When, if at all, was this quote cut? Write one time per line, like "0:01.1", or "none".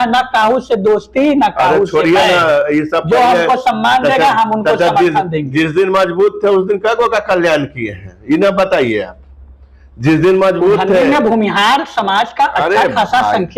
none